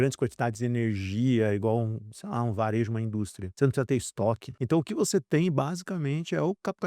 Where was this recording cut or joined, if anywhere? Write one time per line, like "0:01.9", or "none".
0:03.4
0:04.5